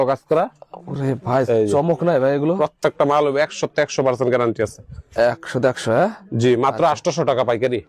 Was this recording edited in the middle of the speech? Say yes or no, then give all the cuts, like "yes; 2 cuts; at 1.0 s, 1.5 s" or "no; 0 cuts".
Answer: no; 0 cuts